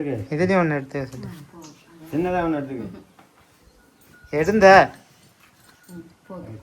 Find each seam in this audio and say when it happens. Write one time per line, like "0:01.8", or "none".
none